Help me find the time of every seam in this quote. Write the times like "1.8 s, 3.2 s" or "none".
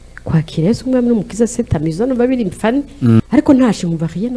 3.2 s